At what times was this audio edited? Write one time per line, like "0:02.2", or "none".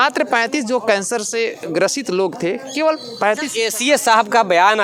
none

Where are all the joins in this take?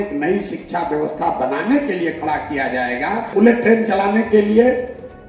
0:03.3

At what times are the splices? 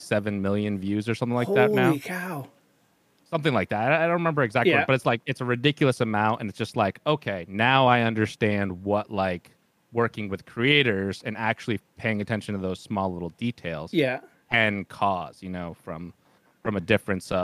none

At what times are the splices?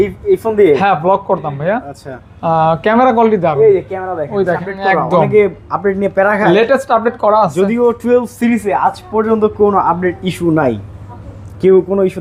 0:04.6

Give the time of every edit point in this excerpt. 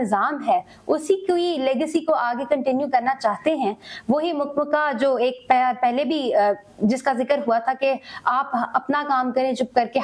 none

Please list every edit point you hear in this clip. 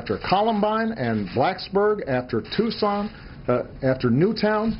none

